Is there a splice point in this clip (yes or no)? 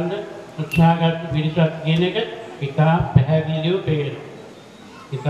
no